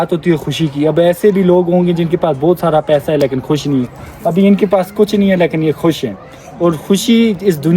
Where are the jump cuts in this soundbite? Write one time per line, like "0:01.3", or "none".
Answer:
none